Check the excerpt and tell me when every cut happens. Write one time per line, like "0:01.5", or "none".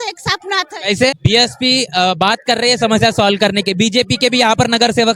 0:01.2